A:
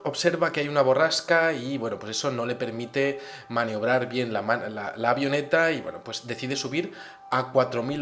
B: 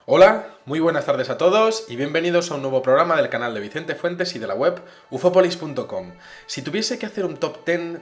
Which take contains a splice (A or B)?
A